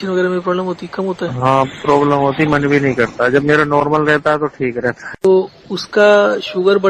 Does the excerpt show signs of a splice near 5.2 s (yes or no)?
yes